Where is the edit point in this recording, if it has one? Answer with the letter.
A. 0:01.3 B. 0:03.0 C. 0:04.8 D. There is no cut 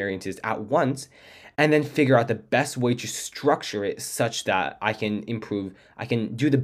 D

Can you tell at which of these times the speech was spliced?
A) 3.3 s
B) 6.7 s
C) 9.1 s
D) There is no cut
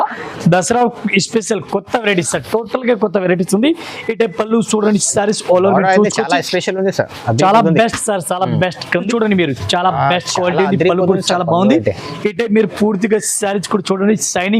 C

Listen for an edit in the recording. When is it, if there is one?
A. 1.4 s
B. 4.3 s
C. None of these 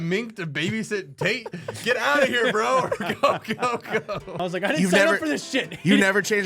B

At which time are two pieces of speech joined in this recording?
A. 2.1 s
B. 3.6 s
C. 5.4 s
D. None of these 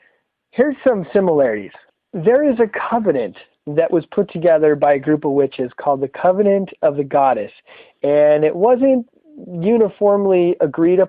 C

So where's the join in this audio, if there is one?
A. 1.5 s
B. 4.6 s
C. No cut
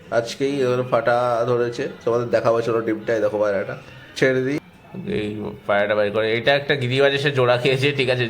B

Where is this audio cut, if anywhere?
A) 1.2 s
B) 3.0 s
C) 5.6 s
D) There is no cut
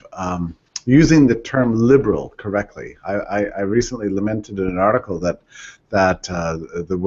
D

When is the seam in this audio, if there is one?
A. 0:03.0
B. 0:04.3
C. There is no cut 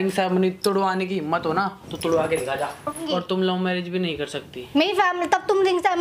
A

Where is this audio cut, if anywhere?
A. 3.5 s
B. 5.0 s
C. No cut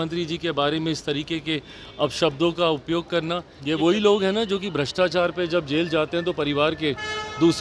A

